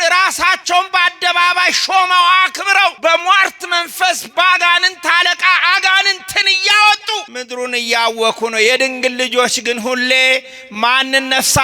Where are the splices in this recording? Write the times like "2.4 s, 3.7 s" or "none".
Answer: 3.0 s, 7.3 s